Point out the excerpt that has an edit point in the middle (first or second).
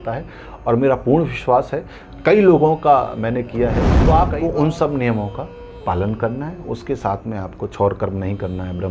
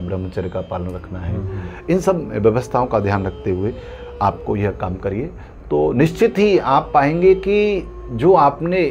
first